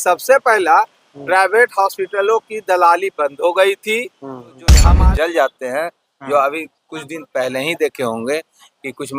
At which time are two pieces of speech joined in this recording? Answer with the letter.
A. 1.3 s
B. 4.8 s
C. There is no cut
B